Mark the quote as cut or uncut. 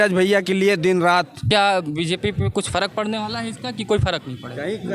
cut